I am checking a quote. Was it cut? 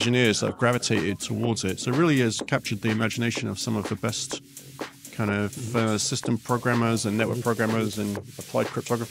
no; 0 cuts

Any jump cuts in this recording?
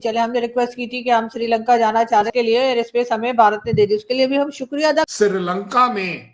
yes; 2 cuts; at 2.3 s, 5.1 s

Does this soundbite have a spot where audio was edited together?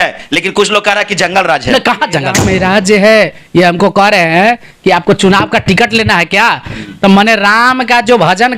yes; 1 cut; at 2.4 s

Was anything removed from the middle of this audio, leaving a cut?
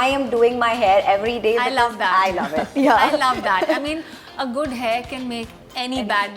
no; 0 cuts

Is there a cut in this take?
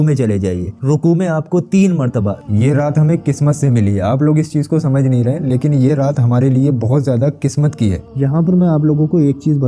yes; 2 cuts; at 2.4 s, 8.0 s

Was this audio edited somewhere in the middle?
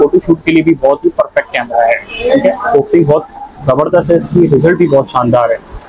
no; 0 cuts

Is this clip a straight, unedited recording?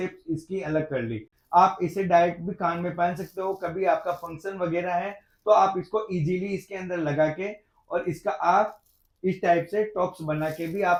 yes; 0 cuts

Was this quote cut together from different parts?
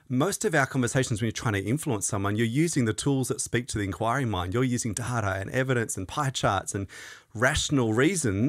no; 0 cuts

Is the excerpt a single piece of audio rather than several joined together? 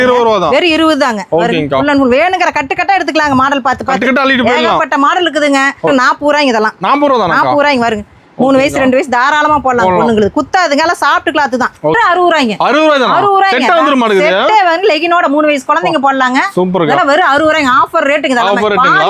no; 2 cuts; at 5.9 s, 12.0 s

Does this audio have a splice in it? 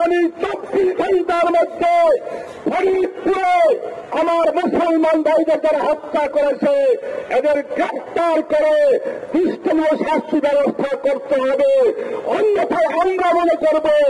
no; 0 cuts

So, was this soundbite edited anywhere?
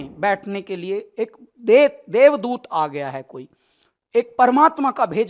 no; 0 cuts

